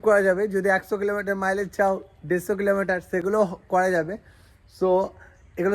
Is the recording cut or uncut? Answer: uncut